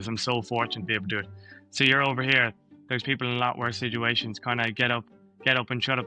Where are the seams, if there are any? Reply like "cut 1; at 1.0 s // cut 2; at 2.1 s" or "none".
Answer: none